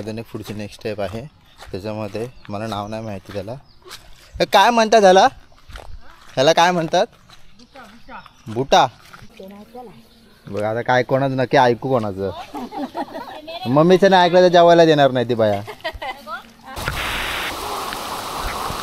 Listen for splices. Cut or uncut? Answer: cut